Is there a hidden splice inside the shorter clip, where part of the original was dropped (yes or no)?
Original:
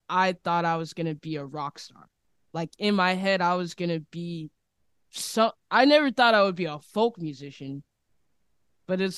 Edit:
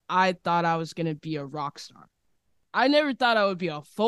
yes